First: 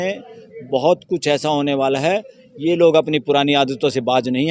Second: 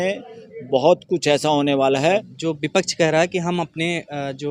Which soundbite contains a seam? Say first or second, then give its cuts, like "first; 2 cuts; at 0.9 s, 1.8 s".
second; 1 cut; at 2.3 s